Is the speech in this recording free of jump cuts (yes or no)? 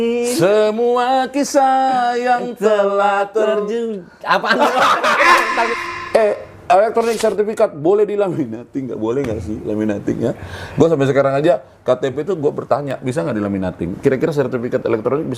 no